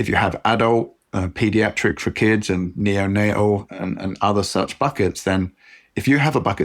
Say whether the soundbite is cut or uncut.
uncut